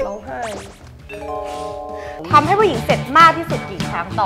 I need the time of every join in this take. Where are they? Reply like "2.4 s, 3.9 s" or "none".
2.2 s